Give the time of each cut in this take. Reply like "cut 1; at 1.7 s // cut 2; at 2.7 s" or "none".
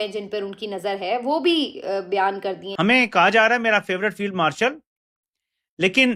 cut 1; at 2.7 s